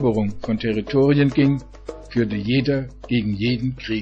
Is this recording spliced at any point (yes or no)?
yes